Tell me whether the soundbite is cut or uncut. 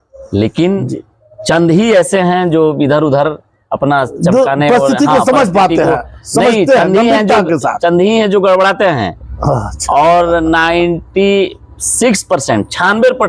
uncut